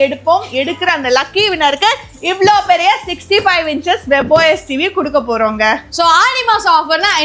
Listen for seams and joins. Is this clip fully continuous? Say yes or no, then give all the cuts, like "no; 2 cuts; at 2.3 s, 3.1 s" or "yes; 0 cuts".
no; 1 cut; at 5.9 s